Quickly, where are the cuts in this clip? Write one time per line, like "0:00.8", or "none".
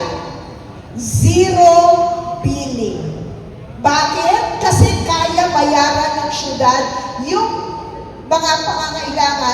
none